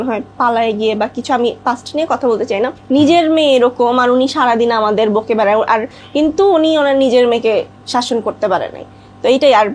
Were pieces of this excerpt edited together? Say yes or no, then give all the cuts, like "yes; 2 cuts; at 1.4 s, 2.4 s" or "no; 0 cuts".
yes; 2 cuts; at 2.8 s, 6.0 s